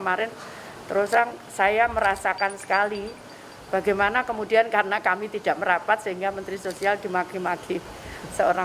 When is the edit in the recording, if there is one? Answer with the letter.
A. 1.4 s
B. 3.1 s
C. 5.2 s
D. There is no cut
D